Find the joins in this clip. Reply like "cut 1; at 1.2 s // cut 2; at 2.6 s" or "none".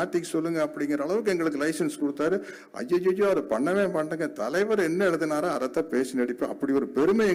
none

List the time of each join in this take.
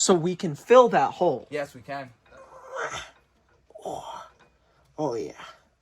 cut 1; at 2.2 s

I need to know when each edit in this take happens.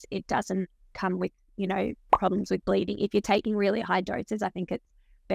none

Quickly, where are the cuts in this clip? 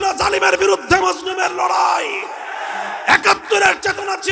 none

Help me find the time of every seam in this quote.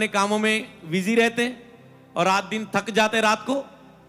none

